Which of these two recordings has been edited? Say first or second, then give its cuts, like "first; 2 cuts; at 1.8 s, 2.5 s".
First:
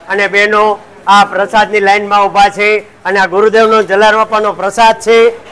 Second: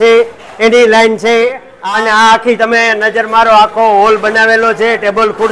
second; 1 cut; at 1.7 s